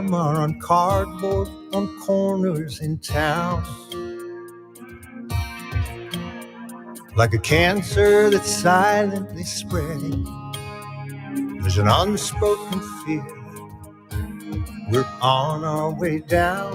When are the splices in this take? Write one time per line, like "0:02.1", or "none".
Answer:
none